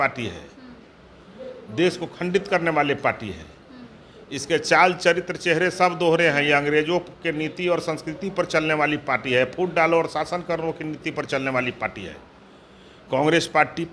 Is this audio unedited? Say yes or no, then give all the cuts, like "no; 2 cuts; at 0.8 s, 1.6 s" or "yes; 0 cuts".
yes; 0 cuts